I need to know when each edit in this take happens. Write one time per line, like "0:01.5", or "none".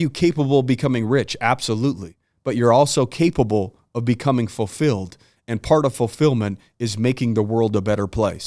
none